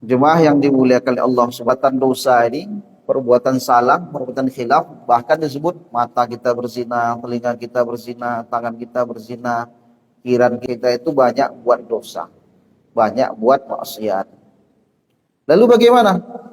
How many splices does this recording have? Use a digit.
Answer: 2